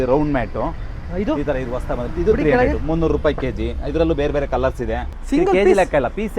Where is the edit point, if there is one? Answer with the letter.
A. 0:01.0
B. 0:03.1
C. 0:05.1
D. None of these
C